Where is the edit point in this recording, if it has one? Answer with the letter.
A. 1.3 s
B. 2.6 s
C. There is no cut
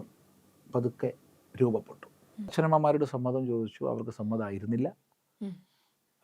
B